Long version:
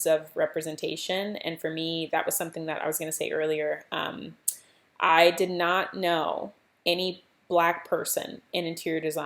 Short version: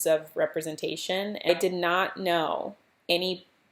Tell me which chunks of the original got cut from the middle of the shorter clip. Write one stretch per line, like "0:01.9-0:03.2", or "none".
0:01.5-0:05.3